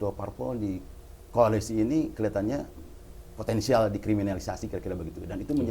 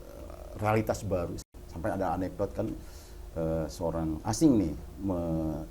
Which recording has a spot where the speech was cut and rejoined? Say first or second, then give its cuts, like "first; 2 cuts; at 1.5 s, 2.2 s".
second; 1 cut; at 1.4 s